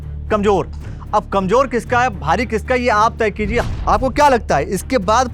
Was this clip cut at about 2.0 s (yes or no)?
no